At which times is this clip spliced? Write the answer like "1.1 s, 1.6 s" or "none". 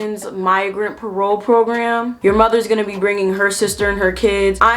2.2 s

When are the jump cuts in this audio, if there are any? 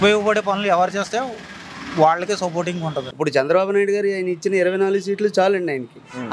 3.0 s

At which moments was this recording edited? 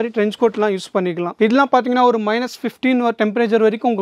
none

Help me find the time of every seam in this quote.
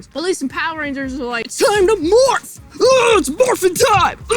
1.5 s

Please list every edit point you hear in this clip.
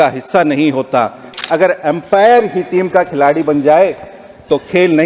1.3 s

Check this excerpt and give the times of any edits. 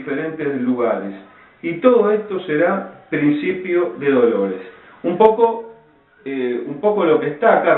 4.2 s

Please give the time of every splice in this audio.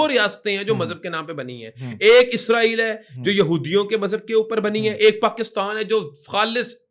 none

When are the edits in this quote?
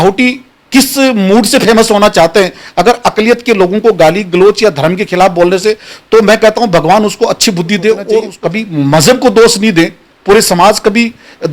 8.3 s

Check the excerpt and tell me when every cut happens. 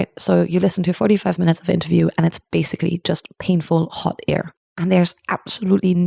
4.7 s

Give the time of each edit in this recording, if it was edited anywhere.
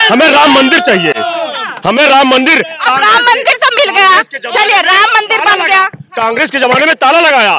none

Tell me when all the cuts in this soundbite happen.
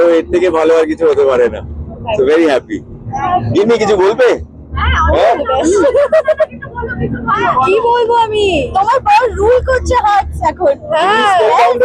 none

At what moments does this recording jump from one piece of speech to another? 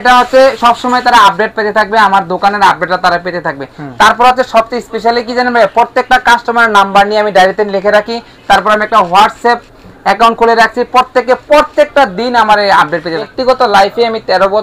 13.3 s

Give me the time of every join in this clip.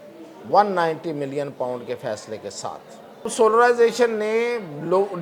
3.3 s

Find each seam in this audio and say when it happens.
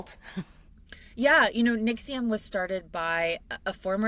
none

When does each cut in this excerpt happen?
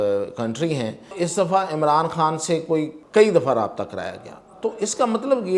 1.1 s, 3.0 s

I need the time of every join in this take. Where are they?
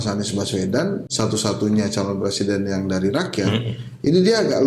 1.1 s

